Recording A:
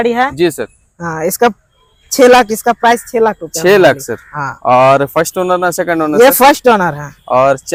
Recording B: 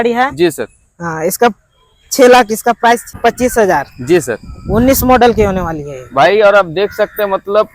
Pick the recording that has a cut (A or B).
B